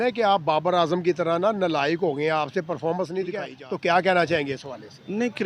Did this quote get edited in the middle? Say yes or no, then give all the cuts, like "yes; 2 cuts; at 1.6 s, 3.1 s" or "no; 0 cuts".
yes; 1 cut; at 3.6 s